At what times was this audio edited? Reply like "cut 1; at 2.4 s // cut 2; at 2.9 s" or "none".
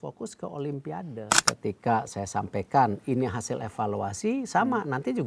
cut 1; at 1.3 s